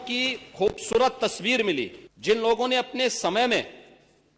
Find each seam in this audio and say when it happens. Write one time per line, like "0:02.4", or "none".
0:02.0